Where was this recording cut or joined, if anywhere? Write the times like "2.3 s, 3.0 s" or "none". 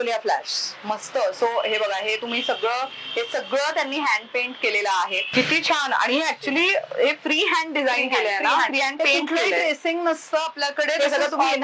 5.2 s